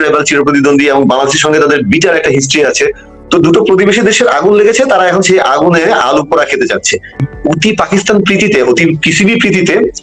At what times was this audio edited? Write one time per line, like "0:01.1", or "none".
0:07.2